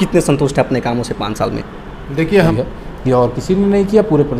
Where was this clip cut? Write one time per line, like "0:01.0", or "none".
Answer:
0:02.5